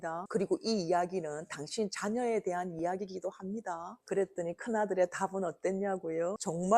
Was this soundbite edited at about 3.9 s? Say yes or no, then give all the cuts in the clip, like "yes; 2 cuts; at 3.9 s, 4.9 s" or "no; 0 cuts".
yes; 1 cut; at 3.9 s